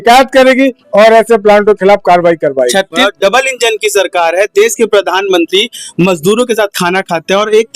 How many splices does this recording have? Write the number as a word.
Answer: one